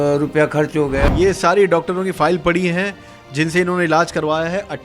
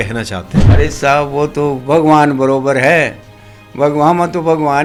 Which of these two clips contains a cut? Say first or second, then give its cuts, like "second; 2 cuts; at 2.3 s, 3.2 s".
first; 1 cut; at 1.0 s